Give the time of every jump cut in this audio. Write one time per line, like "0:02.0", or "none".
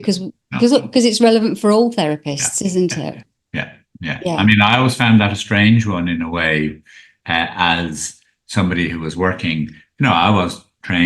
none